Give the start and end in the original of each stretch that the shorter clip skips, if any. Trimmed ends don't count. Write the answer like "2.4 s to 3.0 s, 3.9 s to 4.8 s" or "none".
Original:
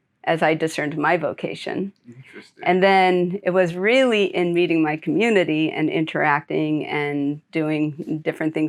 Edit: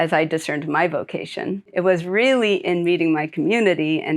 2.0 s to 3.4 s

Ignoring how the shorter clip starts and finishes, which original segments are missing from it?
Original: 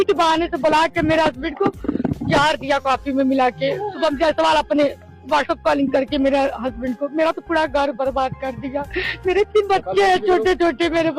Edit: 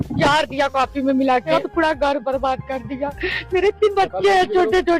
3.6 s to 7.2 s

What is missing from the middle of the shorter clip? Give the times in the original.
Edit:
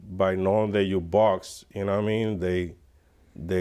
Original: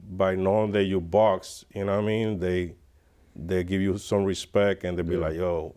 none

